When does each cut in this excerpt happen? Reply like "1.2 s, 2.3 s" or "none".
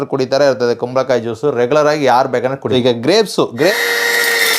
2.6 s, 3.7 s